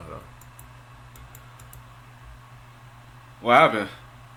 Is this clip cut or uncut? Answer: uncut